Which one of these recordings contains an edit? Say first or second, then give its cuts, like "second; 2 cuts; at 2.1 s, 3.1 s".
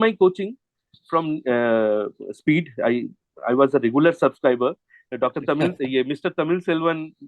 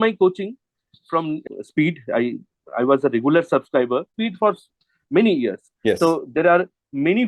second; 2 cuts; at 1.4 s, 4.1 s